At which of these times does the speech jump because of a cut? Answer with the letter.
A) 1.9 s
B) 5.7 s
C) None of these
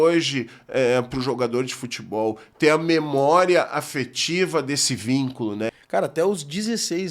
B